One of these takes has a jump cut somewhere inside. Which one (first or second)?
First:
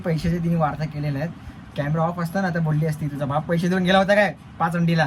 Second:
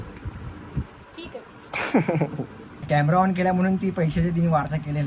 second